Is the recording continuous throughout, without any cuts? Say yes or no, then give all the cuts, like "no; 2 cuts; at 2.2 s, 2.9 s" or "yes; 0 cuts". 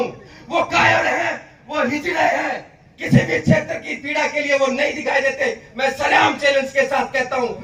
yes; 0 cuts